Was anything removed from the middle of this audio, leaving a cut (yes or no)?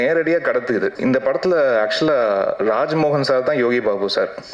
yes